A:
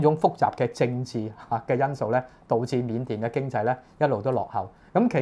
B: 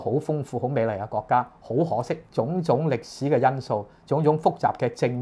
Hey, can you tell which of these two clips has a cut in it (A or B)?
B